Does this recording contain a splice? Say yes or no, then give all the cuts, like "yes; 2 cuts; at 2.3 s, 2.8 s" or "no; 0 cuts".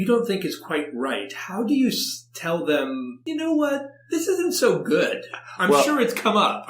yes; 1 cut; at 3.1 s